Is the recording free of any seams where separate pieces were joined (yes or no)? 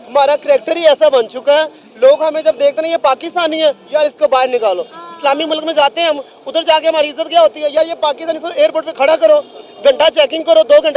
yes